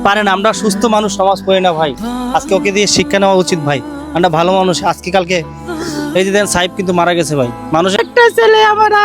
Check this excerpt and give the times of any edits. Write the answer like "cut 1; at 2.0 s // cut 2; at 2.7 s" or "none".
cut 1; at 8.0 s